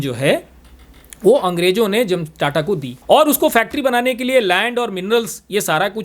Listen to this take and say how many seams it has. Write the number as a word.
one